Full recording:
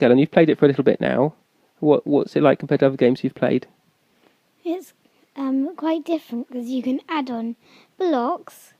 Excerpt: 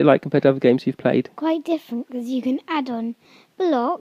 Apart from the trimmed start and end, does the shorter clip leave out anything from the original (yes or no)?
yes